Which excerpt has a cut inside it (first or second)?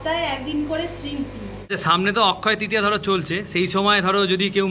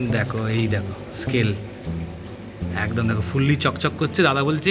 first